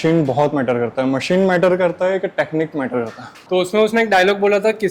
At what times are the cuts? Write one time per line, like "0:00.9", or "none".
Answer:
0:03.4